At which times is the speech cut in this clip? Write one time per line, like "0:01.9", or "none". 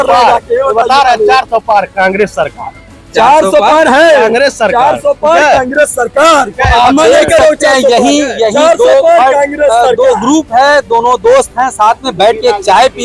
none